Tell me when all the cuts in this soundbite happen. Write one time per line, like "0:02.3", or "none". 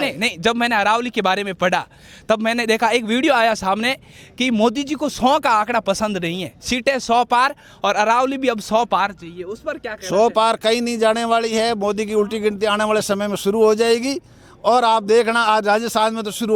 none